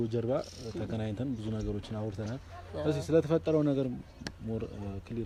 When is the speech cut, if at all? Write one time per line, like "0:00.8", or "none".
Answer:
none